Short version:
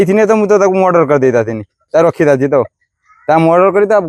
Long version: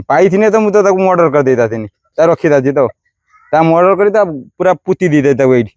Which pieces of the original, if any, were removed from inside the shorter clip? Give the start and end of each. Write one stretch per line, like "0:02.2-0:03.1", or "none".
none

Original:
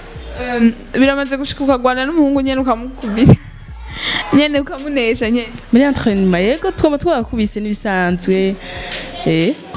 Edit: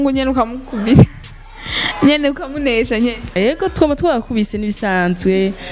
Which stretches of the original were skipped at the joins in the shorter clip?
0:05.7-0:06.4

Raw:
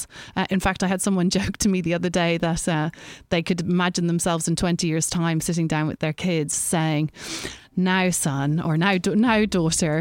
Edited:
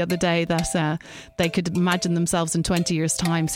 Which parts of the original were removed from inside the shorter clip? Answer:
none

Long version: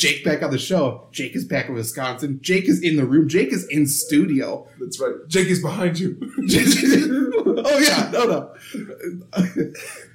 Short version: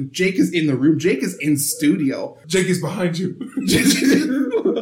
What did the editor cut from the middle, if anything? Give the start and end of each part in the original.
0:04.7-0:05.2

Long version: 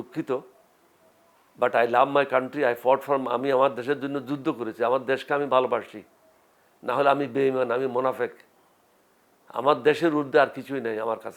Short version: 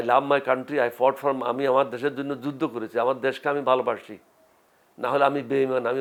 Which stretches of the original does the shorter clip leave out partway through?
none

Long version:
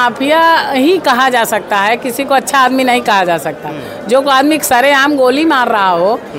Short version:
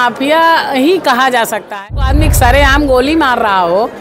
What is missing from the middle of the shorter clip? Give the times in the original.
0:02.0-0:04.3

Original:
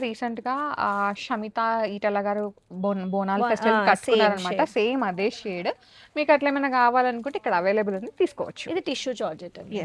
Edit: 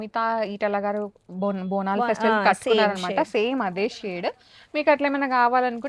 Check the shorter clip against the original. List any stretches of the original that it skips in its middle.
none

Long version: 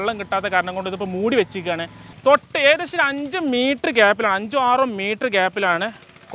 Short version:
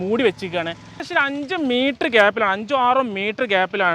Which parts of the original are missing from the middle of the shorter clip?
0:02.1-0:02.8

